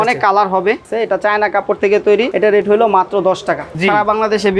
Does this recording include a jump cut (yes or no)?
yes